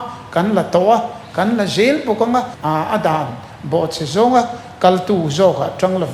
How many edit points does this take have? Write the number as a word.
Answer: one